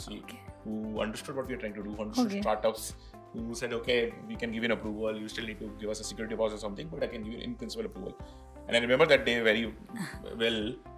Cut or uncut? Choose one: uncut